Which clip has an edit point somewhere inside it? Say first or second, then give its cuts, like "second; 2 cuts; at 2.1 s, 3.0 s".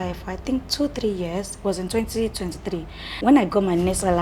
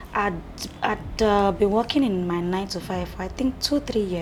first; 1 cut; at 3.2 s